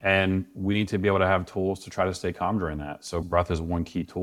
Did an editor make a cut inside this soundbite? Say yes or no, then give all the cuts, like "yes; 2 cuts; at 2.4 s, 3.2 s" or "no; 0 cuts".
yes; 1 cut; at 3.2 s